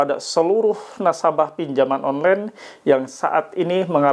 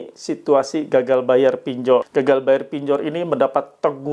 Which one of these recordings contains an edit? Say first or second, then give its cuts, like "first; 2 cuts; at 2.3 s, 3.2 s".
second; 1 cut; at 2.1 s